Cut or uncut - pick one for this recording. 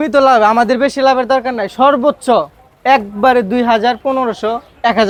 uncut